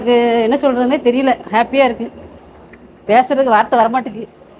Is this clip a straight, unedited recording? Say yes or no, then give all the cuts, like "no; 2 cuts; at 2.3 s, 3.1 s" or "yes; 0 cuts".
yes; 0 cuts